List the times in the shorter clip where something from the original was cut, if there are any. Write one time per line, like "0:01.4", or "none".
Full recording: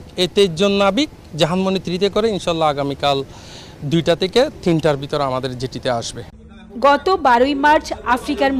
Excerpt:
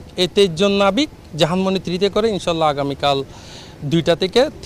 none